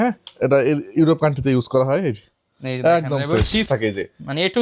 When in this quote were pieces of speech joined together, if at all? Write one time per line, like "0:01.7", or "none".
0:03.7